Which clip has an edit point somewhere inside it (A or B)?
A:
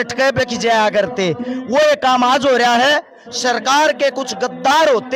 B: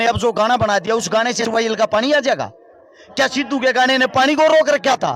B